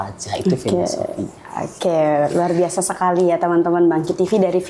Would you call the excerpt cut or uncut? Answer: uncut